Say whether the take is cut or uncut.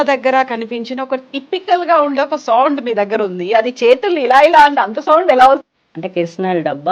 cut